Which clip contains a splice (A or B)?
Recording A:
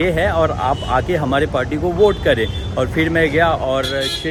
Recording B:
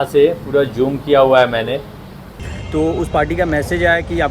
B